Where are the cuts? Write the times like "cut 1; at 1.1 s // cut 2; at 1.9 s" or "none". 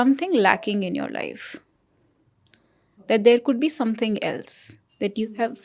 none